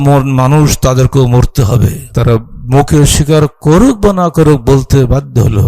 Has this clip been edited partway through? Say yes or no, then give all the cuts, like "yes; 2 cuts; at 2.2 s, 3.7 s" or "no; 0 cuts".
yes; 1 cut; at 2.0 s